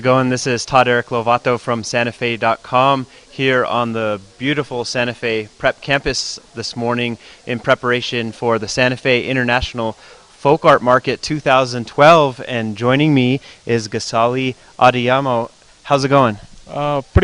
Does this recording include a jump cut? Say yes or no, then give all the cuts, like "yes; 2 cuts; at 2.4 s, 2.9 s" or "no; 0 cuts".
no; 0 cuts